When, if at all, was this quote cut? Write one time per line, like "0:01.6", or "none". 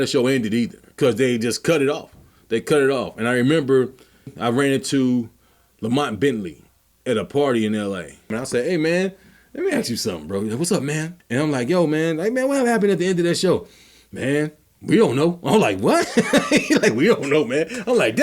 0:04.3
0:08.4
0:11.1